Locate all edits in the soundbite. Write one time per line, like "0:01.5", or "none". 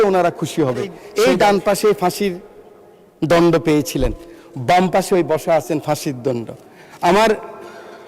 0:01.0